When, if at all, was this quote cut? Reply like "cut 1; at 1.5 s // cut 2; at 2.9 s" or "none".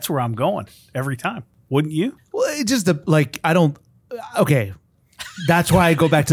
cut 1; at 1.5 s // cut 2; at 2.2 s